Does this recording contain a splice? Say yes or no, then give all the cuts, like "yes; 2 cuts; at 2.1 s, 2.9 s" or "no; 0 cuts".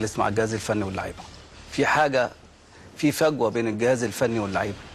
yes; 1 cut; at 3.5 s